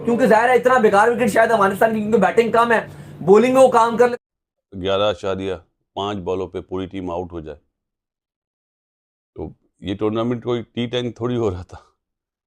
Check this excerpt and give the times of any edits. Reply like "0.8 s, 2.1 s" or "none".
4.1 s